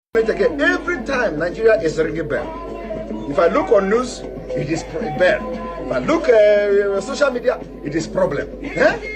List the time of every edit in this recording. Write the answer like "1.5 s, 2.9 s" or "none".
1.0 s